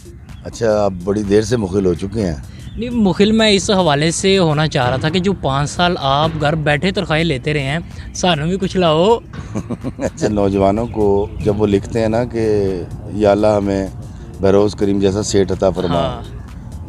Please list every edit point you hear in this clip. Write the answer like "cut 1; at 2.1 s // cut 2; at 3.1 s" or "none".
cut 1; at 10.3 s